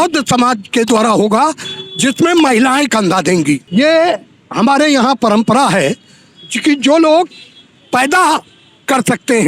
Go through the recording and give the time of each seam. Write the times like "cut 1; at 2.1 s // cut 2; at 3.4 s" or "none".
cut 1; at 3.6 s